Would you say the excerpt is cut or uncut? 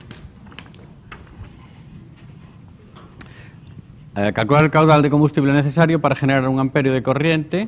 uncut